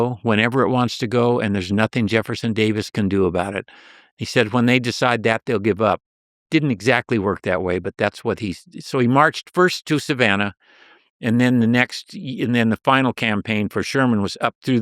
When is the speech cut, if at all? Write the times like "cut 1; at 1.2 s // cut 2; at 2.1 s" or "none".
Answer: none